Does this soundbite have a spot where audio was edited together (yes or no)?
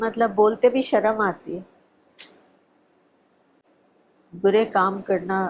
no